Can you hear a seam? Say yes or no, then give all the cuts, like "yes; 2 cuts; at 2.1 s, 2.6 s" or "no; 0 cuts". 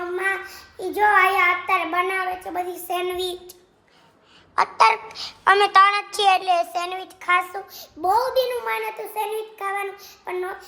no; 0 cuts